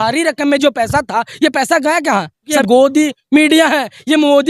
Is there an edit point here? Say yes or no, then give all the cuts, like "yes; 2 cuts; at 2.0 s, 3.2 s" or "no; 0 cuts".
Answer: yes; 1 cut; at 2.5 s